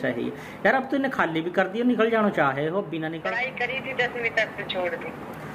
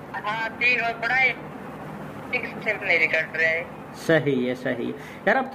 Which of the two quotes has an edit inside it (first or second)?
first